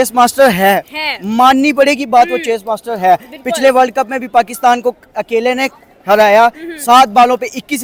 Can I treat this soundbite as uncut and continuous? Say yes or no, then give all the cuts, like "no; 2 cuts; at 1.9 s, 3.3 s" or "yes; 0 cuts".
yes; 0 cuts